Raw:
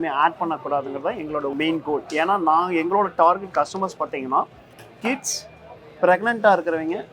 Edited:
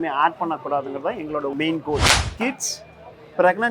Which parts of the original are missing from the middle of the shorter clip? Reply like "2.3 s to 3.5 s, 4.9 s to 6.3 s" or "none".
2.1 s to 4.7 s